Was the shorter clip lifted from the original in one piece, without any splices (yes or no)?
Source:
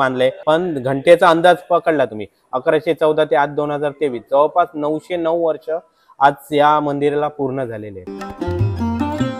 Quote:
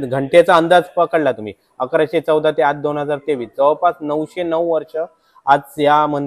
yes